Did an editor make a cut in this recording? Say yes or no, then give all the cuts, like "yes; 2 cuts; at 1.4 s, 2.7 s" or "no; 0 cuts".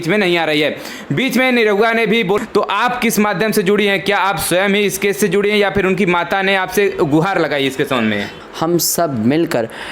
yes; 2 cuts; at 2.4 s, 8.4 s